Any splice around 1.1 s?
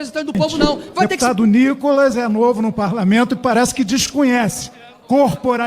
yes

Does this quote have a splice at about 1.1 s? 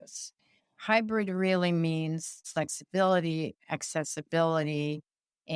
no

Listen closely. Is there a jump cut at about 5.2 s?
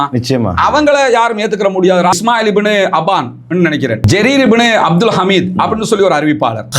no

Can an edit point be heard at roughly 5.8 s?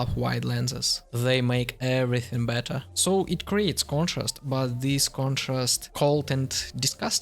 yes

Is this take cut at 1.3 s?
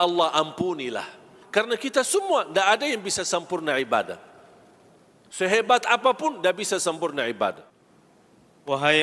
yes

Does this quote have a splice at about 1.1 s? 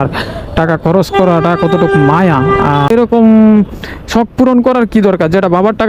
no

